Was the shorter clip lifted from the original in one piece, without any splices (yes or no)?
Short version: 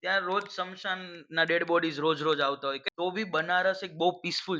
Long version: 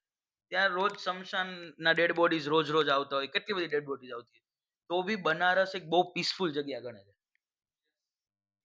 no